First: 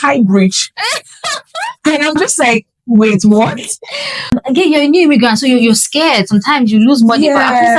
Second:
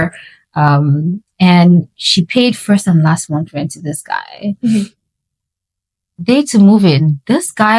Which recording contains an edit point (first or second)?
first